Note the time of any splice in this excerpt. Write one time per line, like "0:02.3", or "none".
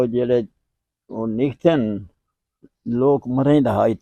none